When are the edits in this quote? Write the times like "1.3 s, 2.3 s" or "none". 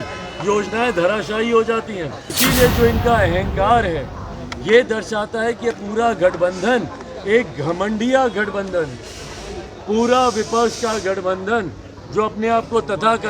2.2 s